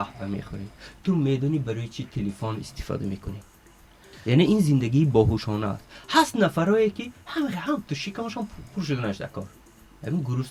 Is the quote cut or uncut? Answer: uncut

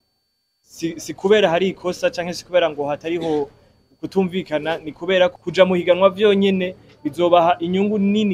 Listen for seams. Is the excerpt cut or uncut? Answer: cut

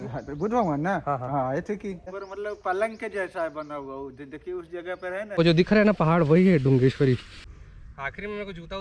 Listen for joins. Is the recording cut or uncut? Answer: cut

